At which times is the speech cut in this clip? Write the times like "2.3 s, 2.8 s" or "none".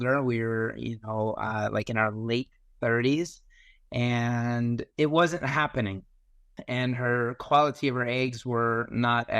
6.6 s